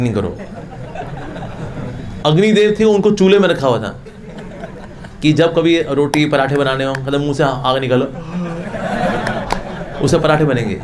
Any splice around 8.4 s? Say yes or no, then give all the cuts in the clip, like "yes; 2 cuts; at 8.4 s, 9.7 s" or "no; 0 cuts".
no; 0 cuts